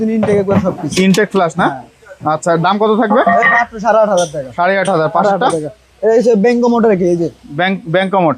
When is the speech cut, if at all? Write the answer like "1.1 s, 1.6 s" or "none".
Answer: none

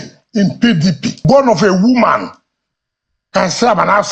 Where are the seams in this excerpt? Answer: 1.1 s

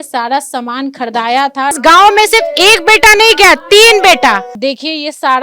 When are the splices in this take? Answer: 1.8 s, 4.5 s

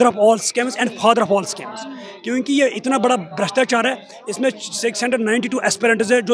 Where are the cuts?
none

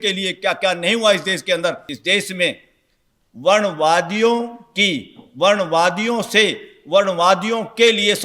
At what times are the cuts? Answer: 1.9 s

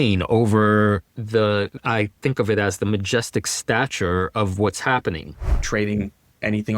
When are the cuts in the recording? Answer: 1.8 s, 5.6 s

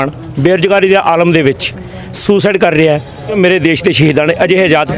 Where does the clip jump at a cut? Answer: 3.3 s

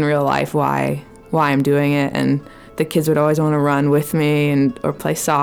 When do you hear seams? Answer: none

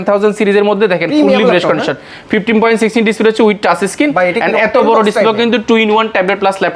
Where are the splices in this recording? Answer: none

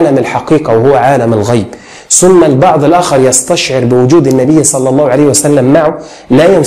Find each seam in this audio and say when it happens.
none

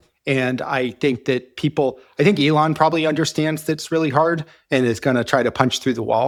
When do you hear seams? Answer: none

